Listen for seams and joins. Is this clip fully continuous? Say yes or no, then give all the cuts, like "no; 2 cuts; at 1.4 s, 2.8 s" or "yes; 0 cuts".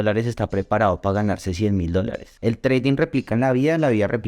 no; 1 cut; at 2.3 s